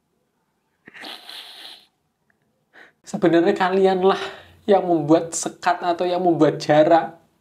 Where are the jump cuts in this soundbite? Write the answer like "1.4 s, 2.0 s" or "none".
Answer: 2.9 s